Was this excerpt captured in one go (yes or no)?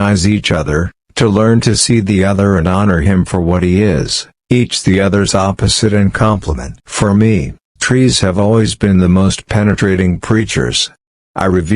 yes